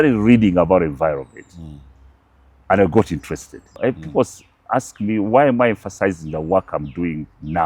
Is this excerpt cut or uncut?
cut